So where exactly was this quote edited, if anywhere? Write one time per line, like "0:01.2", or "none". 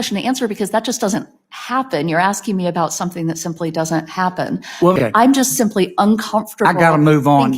0:05.0